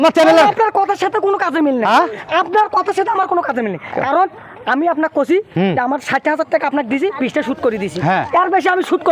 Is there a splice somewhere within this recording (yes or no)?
no